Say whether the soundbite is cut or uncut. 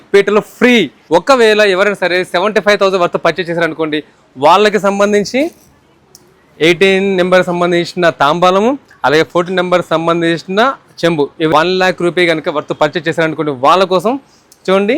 cut